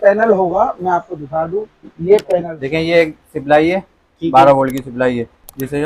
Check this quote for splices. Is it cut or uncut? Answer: cut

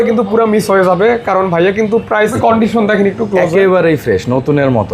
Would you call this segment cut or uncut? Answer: cut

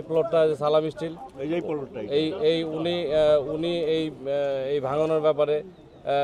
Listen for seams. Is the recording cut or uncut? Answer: uncut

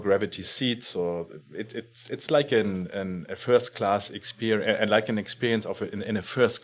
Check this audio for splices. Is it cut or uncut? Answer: uncut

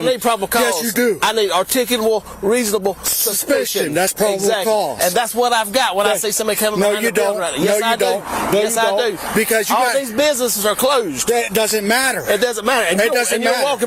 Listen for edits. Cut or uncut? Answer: uncut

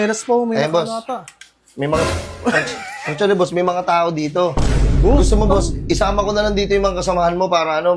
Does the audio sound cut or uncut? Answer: uncut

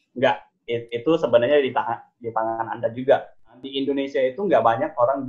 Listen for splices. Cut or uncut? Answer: cut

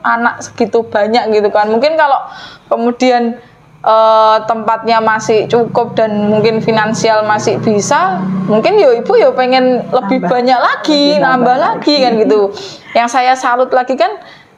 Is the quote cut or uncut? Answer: uncut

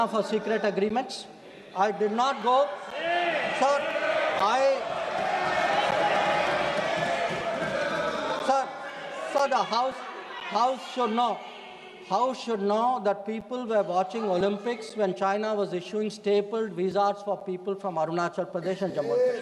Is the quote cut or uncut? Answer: uncut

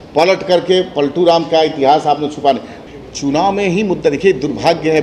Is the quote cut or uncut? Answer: cut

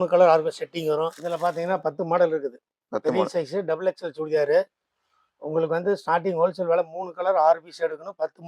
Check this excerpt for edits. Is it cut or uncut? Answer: cut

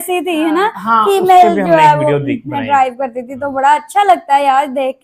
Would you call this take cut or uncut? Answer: uncut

